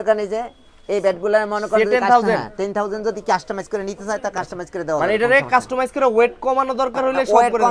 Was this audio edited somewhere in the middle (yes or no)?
no